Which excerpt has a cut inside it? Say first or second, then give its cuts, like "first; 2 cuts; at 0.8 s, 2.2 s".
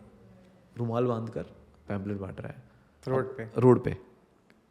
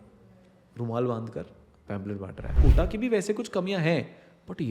second; 1 cut; at 2.5 s